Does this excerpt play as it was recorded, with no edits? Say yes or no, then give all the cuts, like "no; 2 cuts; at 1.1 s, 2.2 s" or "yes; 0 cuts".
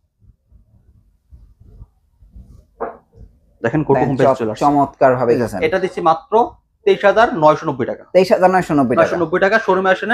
no; 1 cut; at 5.4 s